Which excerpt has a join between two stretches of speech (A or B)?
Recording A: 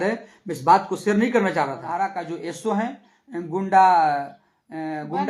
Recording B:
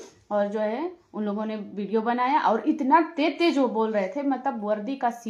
A